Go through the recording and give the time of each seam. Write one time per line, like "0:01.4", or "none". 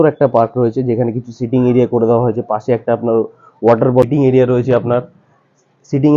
0:04.1